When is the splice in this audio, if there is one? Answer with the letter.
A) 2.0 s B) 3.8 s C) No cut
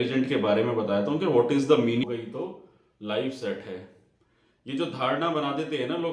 A